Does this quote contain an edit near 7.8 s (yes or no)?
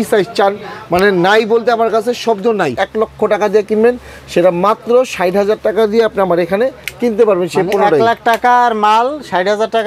no